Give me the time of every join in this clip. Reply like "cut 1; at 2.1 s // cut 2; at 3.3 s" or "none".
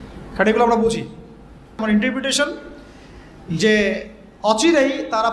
cut 1; at 1.8 s